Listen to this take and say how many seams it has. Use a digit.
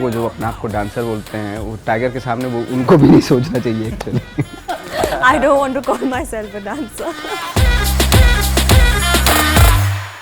2